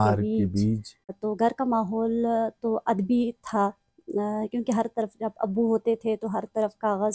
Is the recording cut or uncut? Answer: cut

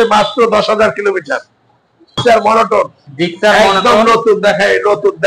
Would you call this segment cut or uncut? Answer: cut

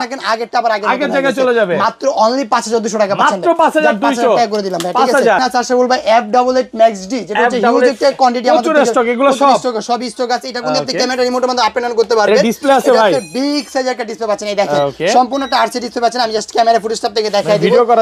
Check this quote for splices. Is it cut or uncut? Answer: uncut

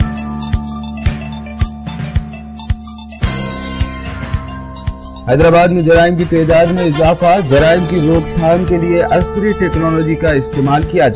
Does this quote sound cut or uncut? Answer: uncut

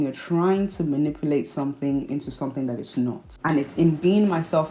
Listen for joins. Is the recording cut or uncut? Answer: cut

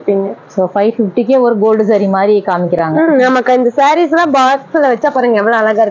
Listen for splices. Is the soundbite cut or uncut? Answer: uncut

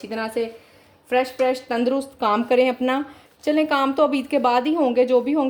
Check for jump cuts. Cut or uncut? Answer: uncut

